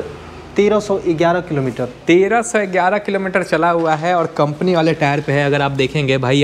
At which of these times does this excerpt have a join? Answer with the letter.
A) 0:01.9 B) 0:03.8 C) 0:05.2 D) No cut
D